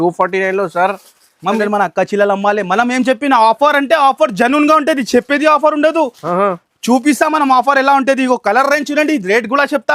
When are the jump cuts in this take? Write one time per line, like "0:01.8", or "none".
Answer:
0:01.6